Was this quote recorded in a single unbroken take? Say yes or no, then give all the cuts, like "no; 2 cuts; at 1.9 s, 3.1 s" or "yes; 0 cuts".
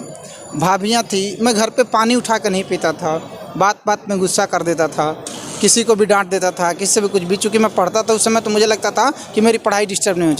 yes; 0 cuts